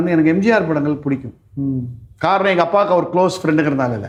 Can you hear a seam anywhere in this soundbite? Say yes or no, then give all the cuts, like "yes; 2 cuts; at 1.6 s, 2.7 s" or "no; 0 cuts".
no; 0 cuts